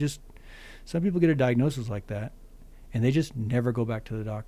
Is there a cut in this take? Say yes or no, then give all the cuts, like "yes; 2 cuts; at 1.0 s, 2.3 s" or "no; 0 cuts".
no; 0 cuts